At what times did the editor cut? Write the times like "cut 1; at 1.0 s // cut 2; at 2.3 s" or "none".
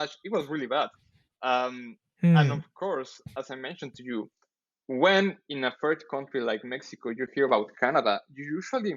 none